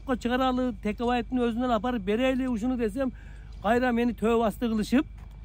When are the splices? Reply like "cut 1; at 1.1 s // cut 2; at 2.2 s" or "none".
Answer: none